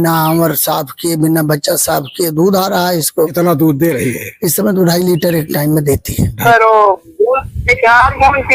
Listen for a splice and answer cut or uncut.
cut